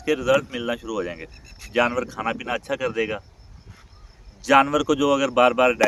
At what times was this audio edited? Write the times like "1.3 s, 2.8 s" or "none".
none